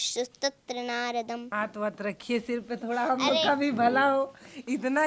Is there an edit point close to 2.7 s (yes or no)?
no